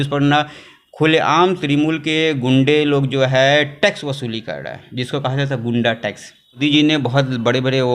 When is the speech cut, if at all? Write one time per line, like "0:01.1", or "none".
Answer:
0:06.6